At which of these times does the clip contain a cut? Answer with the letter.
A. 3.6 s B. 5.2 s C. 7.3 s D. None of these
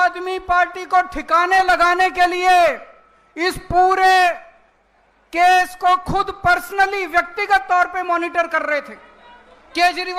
D